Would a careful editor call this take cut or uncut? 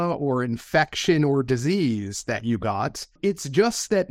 cut